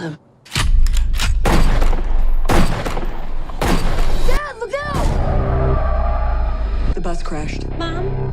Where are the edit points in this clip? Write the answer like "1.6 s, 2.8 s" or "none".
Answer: 4.2 s, 6.8 s

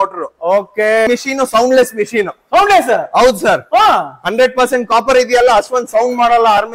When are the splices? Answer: 1.1 s

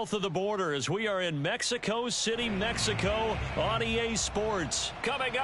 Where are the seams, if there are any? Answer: none

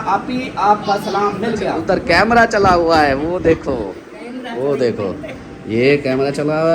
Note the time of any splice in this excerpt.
1.8 s

